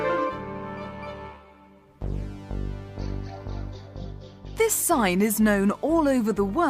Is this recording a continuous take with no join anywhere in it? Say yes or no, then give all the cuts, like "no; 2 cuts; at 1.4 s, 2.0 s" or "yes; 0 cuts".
no; 1 cut; at 1.4 s